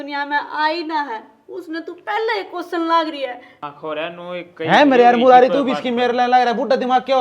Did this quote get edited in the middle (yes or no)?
yes